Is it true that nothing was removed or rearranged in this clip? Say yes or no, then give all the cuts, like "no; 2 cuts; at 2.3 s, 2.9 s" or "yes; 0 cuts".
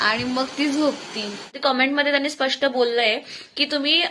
no; 1 cut; at 1.4 s